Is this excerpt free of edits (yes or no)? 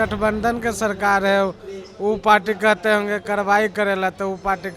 yes